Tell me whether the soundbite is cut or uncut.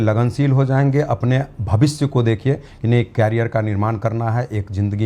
uncut